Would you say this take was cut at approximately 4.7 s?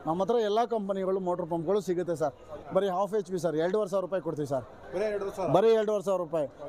no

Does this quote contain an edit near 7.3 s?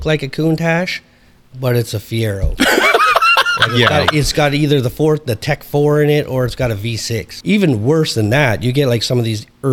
yes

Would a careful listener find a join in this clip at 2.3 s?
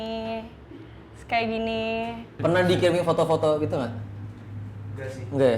yes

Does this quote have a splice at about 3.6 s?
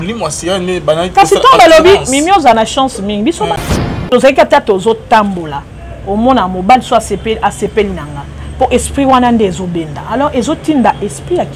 yes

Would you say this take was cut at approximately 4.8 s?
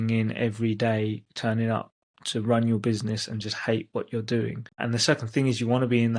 yes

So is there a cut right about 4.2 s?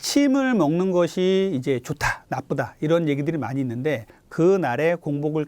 yes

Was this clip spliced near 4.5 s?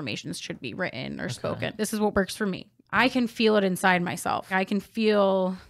yes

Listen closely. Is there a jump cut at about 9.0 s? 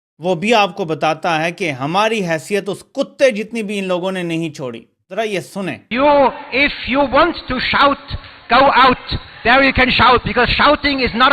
no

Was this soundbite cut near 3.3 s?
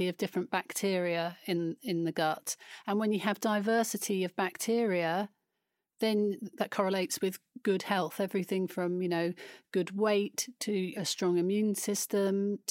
no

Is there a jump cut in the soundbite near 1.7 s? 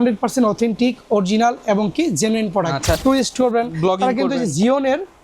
no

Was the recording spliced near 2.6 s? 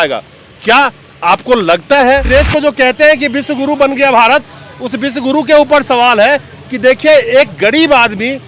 yes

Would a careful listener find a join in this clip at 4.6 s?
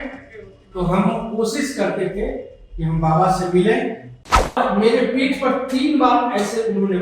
yes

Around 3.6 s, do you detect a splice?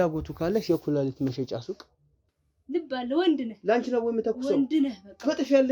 no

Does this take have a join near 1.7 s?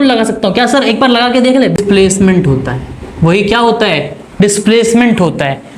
yes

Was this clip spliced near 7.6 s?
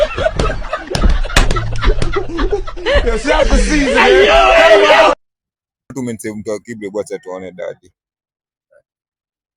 no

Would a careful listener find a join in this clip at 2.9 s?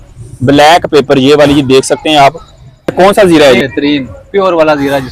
yes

